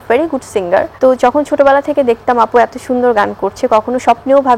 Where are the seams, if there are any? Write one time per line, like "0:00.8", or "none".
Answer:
0:00.9